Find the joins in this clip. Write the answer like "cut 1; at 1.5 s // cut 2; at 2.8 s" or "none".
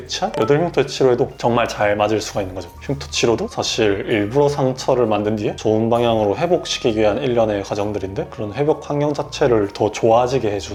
none

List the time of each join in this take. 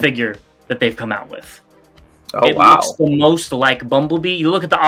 none

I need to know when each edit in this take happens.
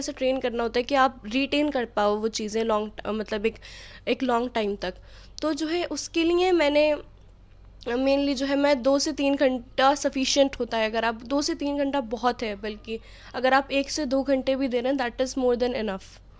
none

